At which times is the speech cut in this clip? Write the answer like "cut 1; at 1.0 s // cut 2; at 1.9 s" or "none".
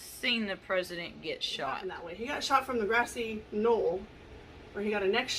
cut 1; at 2.2 s